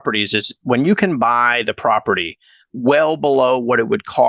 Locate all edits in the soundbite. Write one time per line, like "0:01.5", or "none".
none